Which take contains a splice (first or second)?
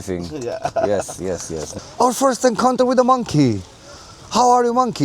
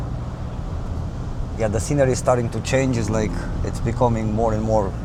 first